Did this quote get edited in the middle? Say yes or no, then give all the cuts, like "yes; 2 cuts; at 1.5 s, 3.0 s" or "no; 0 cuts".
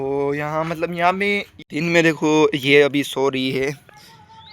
yes; 1 cut; at 1.6 s